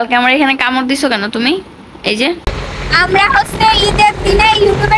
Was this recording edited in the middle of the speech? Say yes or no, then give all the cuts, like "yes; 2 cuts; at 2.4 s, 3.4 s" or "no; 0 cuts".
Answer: yes; 1 cut; at 2.6 s